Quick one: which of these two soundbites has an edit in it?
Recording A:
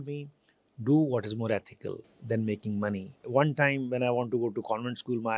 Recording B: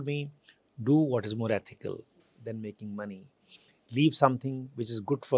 A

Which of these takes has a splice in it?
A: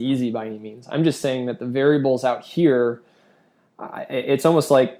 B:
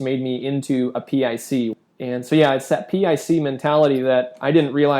B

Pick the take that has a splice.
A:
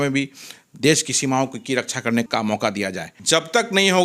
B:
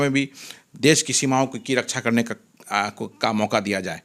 A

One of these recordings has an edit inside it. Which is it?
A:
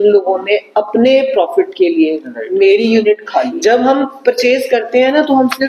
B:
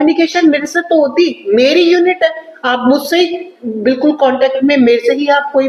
A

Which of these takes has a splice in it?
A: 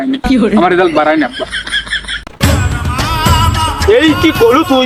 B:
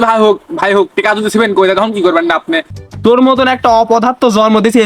B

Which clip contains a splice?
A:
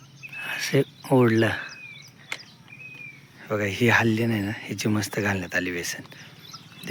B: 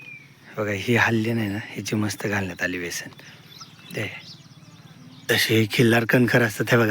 B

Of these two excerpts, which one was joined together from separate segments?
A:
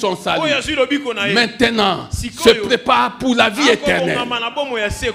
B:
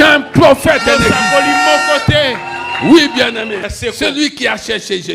B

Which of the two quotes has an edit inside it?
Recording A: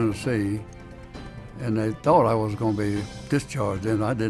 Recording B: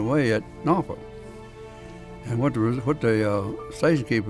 A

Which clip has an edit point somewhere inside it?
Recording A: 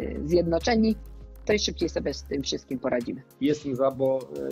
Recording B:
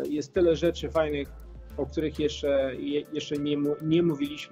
A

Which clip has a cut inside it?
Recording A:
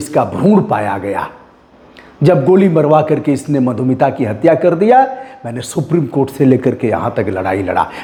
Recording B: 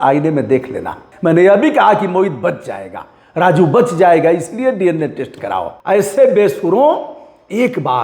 B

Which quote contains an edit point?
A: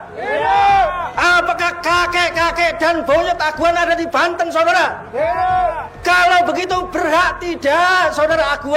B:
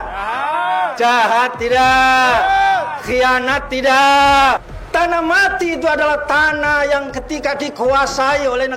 B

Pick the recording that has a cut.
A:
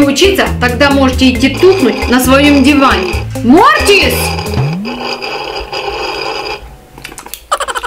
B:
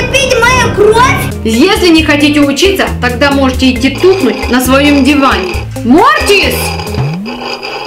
B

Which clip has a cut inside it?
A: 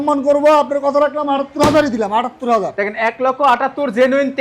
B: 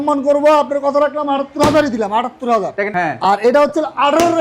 B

